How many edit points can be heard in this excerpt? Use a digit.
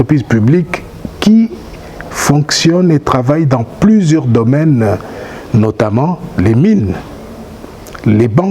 0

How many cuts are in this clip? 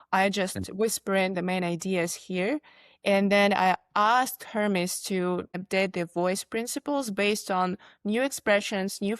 1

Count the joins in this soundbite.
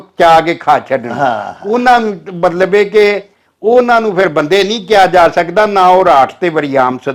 0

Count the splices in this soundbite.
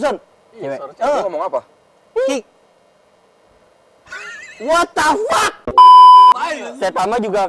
1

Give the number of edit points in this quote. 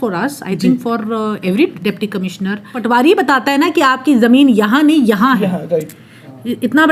1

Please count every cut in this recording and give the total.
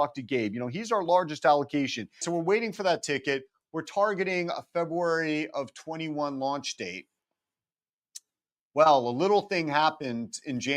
1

